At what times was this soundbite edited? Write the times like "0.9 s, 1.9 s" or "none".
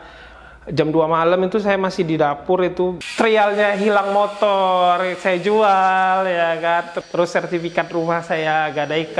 3.0 s, 7.0 s